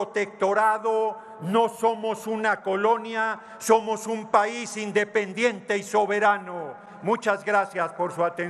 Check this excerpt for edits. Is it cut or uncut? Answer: uncut